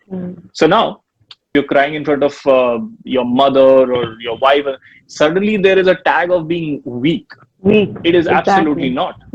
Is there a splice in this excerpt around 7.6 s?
no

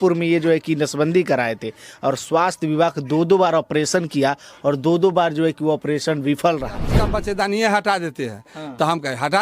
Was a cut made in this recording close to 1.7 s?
no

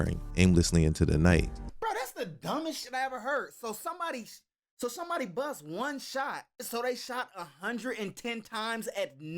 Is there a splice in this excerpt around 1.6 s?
yes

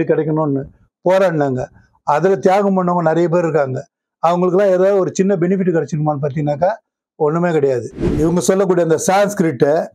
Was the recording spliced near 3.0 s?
no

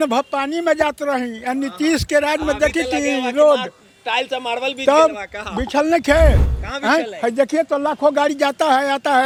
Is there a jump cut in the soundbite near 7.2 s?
no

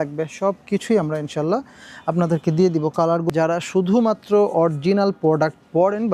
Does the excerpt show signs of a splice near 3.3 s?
yes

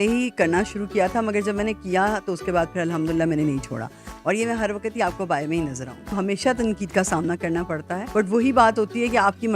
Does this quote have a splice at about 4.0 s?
no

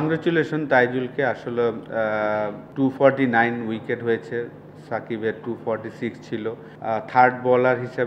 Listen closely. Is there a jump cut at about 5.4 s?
no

